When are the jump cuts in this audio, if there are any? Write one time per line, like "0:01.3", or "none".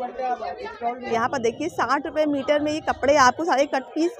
0:01.0